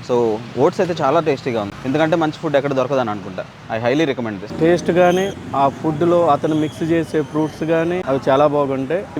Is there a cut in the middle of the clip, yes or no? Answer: yes